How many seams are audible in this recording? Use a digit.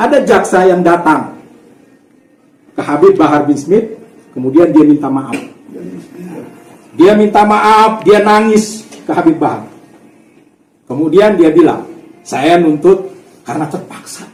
0